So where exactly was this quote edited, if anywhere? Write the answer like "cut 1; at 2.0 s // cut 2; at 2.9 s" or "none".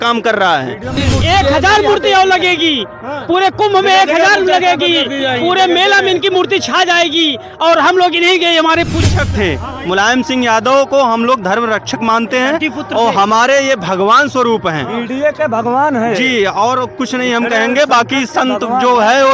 cut 1; at 1.0 s // cut 2; at 9.0 s